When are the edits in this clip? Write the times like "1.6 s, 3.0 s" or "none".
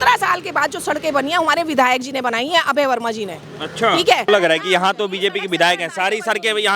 4.3 s